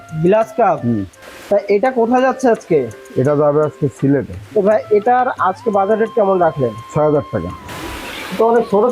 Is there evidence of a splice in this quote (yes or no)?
yes